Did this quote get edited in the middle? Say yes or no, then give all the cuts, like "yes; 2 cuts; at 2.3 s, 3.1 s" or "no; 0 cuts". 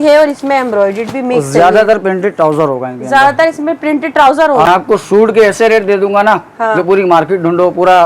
yes; 1 cut; at 4.7 s